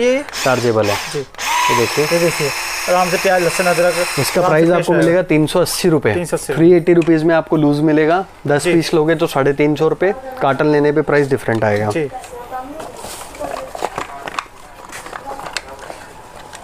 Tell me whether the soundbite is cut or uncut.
uncut